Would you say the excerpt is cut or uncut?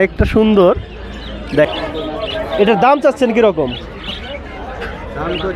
cut